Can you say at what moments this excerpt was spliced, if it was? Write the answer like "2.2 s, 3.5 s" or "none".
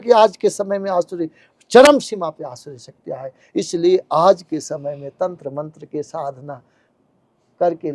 none